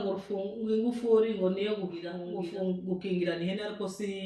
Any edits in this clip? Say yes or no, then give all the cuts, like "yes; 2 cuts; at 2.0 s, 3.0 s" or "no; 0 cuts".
yes; 1 cut; at 2.2 s